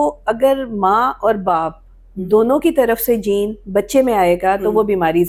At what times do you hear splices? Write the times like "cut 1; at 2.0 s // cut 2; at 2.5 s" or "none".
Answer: none